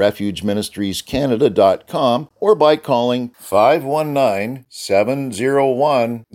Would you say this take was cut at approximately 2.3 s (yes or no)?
yes